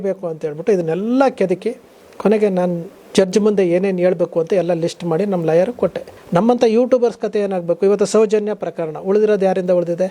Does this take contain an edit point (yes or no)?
yes